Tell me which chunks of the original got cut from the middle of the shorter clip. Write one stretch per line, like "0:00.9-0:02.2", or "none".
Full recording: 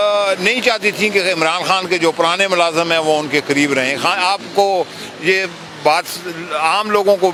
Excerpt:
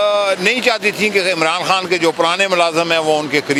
none